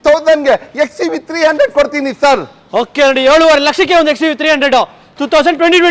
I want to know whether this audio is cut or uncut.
uncut